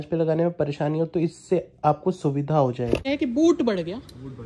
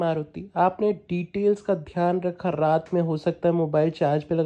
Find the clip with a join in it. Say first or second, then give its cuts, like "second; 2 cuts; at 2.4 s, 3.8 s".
first; 1 cut; at 3.0 s